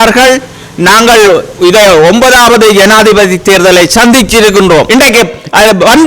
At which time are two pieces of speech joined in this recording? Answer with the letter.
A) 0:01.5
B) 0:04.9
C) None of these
B